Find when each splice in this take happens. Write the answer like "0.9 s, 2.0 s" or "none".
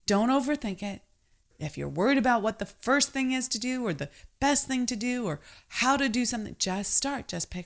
1.6 s

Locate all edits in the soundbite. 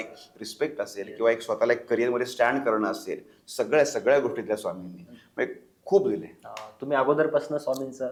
none

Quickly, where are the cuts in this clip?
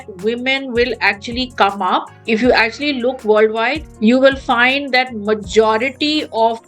2.1 s

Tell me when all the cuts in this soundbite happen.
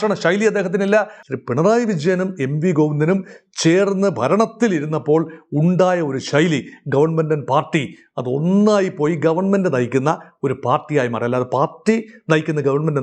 1.2 s

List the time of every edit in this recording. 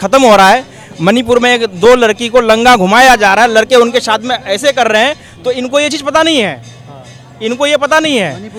none

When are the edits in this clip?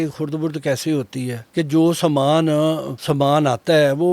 1.4 s, 2.9 s

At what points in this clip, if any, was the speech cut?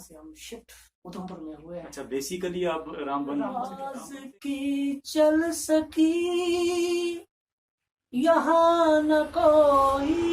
3.8 s

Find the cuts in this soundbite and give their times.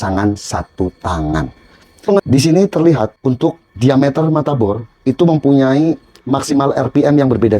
2.2 s, 3.1 s

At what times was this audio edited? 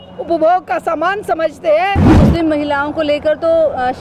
2.1 s

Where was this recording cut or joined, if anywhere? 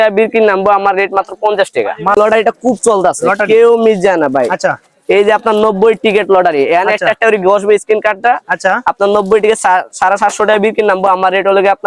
2.2 s

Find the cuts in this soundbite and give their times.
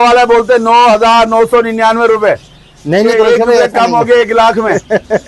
none

